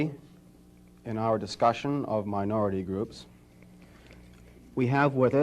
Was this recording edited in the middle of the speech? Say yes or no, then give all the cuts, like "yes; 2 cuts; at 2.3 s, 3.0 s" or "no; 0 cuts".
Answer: no; 0 cuts